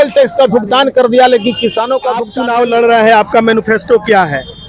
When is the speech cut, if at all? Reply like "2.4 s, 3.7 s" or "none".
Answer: 2.3 s